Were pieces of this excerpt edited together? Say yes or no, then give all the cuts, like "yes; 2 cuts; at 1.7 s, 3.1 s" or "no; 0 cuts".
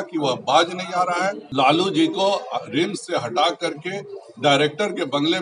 yes; 1 cut; at 1.4 s